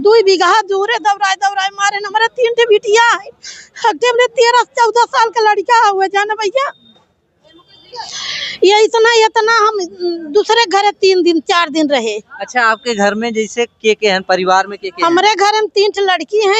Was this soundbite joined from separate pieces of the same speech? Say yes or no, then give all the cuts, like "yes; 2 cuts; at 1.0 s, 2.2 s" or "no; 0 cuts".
no; 0 cuts